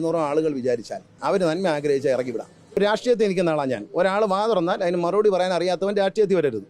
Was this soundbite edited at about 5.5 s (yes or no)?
no